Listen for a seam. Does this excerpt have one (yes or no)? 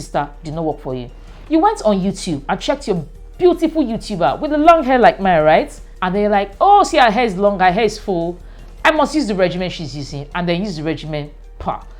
no